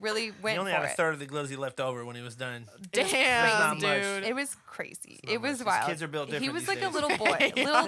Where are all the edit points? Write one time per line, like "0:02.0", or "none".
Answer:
none